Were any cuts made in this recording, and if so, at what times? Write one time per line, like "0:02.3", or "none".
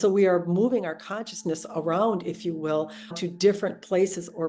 0:03.1